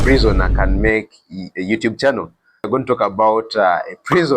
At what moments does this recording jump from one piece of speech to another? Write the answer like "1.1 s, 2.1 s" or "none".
2.7 s

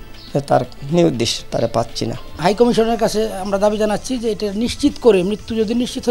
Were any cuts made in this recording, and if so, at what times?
2.3 s

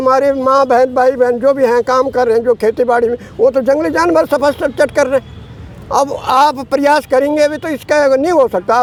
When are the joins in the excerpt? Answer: none

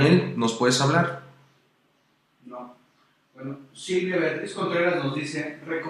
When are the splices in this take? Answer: 3.6 s

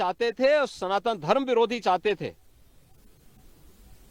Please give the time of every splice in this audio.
none

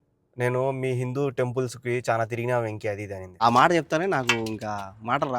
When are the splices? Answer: 3.2 s

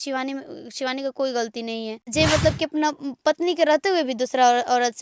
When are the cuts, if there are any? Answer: 2.1 s

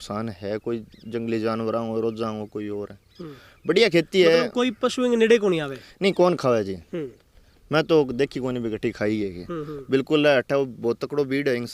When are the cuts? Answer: none

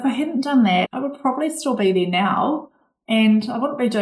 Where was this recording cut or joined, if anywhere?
0.9 s

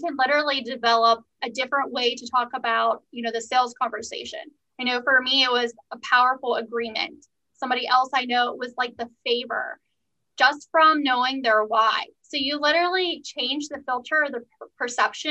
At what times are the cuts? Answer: none

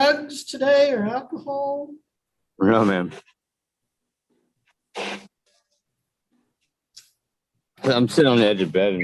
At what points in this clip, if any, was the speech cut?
none

